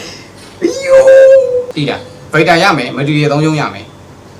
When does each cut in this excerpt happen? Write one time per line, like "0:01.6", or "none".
0:01.7

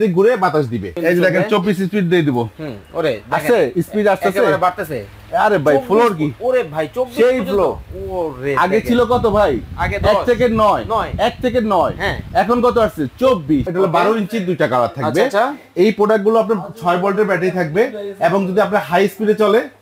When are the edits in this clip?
0:00.9
0:13.7

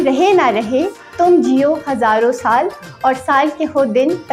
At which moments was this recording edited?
none

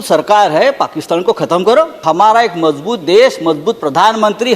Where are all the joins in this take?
0:02.0

